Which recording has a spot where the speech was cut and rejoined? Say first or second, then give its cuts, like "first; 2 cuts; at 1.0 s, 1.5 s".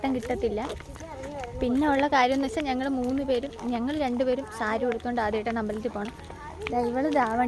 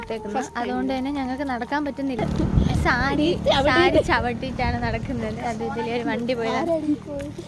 second; 1 cut; at 2.2 s